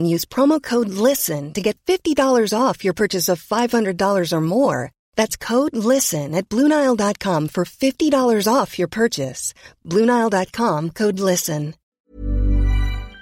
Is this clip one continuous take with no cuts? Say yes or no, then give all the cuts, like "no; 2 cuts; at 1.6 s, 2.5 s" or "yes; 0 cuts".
no; 1 cut; at 11.9 s